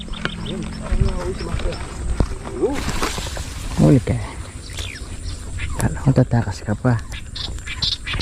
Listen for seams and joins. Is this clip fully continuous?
no; 1 cut; at 2.8 s

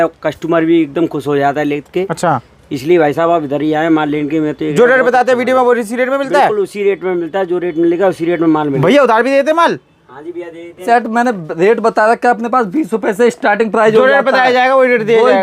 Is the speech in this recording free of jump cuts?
no; 2 cuts; at 8.8 s, 10.8 s

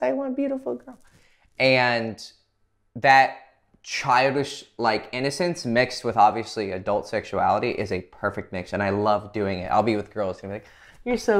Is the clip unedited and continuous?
yes; 0 cuts

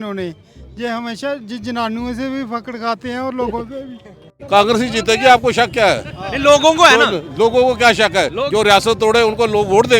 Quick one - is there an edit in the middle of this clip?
yes; 1 cut; at 4.4 s

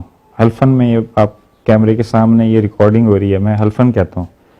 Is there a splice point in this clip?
no; 0 cuts

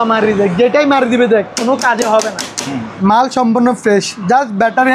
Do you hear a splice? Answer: yes; 1 cut; at 2.9 s

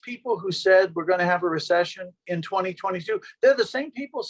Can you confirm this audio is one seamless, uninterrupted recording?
no; 1 cut; at 2.3 s

